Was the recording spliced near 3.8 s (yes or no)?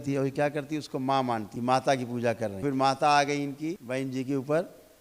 yes